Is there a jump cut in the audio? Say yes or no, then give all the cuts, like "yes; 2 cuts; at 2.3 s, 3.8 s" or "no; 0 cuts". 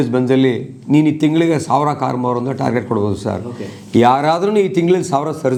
no; 0 cuts